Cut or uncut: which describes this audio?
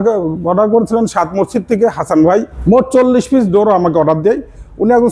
cut